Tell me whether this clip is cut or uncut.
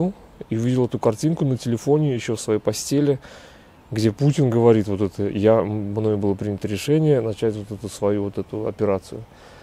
uncut